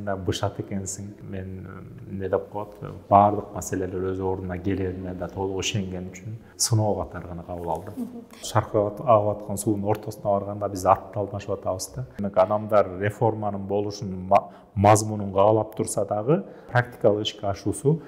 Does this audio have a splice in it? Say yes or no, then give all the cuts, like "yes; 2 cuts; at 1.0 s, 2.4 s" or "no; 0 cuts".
yes; 5 cuts; at 1.1 s, 6.5 s, 8.4 s, 12.2 s, 16.6 s